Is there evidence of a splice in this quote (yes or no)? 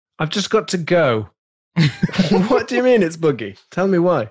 no